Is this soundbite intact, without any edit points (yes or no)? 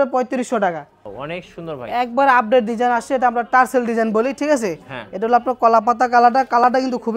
no